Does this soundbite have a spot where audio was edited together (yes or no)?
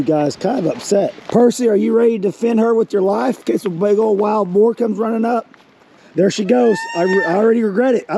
yes